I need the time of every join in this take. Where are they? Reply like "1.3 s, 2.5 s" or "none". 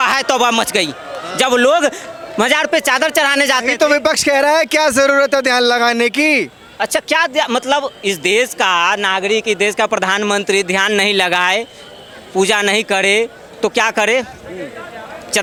none